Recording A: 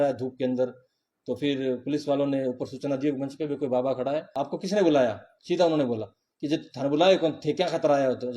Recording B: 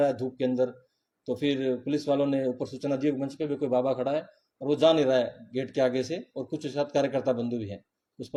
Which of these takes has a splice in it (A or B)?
A